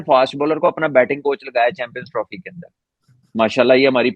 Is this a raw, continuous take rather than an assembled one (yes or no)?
yes